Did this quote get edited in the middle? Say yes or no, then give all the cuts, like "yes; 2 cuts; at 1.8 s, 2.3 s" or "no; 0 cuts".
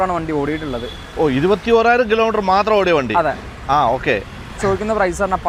no; 0 cuts